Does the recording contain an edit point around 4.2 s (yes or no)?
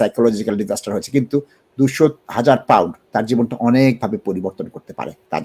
no